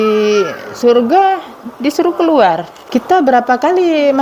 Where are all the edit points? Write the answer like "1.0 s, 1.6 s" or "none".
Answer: 2.7 s